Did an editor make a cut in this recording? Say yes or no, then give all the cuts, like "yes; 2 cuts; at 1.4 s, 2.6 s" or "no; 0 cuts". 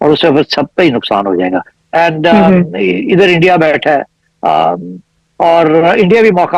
yes; 1 cut; at 1.8 s